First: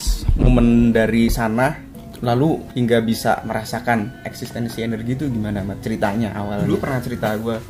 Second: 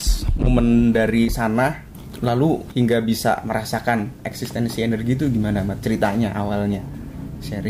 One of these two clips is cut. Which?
first; 1 cut; at 6.6 s

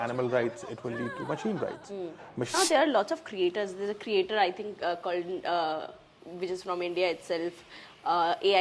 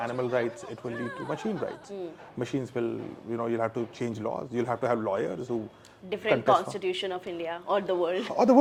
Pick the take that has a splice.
first; 1 cut; at 2.5 s

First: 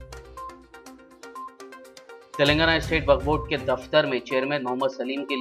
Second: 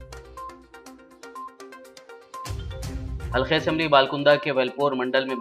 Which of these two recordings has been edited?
second; 1 cut; at 1.9 s

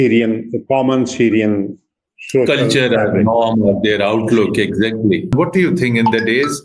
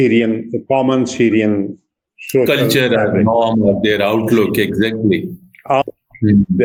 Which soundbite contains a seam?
first; 1 cut; at 5.3 s

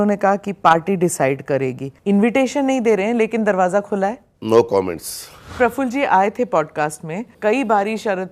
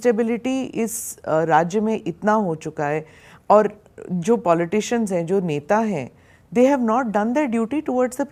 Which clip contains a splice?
first; 3 cuts; at 1.9 s, 5.5 s, 7.3 s

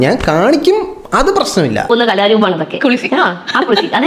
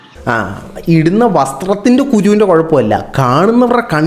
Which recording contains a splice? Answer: first; 1 cut; at 1.9 s

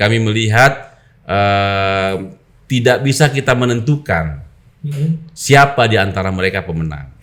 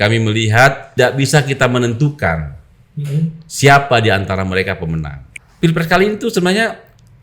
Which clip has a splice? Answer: second; 2 cuts; at 0.9 s, 5.2 s

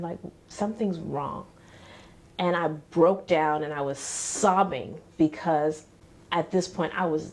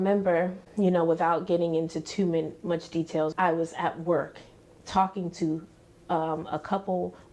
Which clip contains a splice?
second; 1 cut; at 3.3 s

